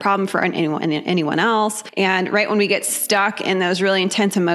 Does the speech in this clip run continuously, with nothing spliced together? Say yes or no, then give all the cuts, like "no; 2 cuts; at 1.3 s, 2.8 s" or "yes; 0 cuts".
no; 1 cut; at 1.8 s